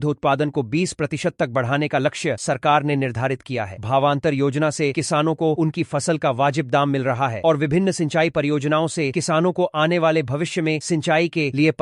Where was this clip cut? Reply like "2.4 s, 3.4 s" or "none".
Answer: none